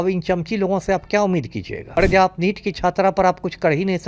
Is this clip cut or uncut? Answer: cut